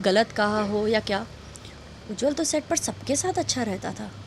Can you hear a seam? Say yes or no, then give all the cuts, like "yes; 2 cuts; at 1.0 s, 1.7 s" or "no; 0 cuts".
no; 0 cuts